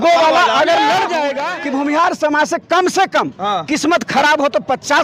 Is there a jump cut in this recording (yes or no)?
yes